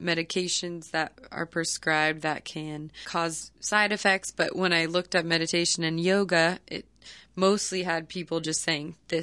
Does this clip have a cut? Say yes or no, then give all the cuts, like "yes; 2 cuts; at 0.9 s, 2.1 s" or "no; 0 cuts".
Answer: yes; 1 cut; at 3.0 s